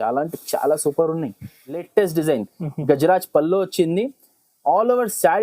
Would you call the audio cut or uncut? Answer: cut